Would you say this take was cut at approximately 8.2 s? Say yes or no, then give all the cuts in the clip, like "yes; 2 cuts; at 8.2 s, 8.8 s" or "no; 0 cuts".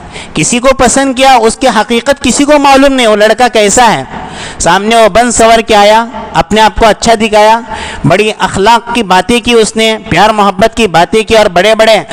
no; 0 cuts